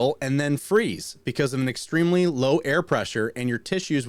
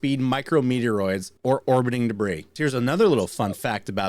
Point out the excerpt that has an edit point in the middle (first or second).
second